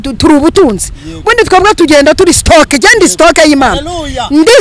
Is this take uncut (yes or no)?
yes